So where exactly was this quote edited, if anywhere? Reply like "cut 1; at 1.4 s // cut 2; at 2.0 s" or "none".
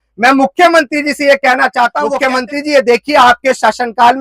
cut 1; at 2.1 s